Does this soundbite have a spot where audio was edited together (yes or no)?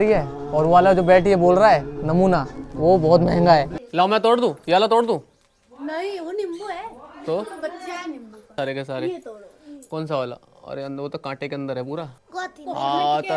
yes